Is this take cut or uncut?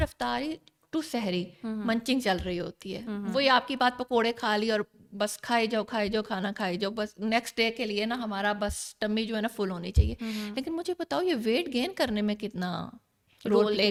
uncut